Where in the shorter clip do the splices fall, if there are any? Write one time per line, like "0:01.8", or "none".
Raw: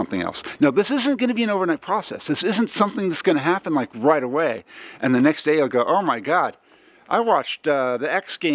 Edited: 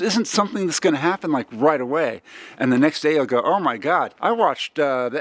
0:04.1